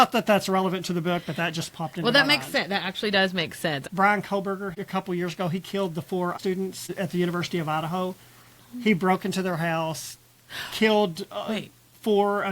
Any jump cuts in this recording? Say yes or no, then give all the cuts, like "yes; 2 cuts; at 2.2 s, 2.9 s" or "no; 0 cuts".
yes; 3 cuts; at 3.8 s, 4.7 s, 6.4 s